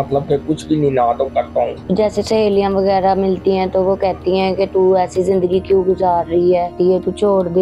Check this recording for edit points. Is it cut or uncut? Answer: cut